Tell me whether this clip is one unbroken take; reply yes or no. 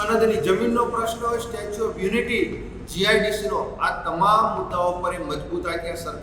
yes